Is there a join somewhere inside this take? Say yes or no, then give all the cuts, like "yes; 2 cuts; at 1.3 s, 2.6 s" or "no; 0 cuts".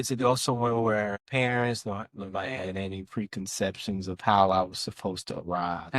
yes; 1 cut; at 1.2 s